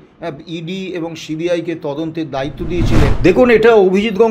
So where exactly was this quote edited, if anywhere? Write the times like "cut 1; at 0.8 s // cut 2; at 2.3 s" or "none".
cut 1; at 3.2 s